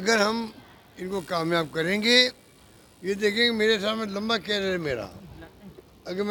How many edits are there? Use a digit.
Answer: 0